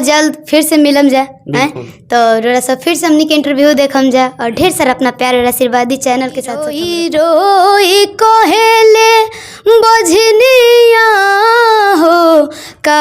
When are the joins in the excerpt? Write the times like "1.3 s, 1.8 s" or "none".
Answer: 6.8 s